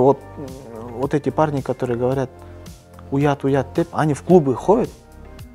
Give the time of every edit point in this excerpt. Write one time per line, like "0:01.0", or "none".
none